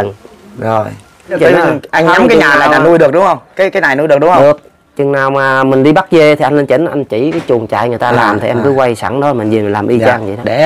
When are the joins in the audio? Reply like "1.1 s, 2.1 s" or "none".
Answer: 1.4 s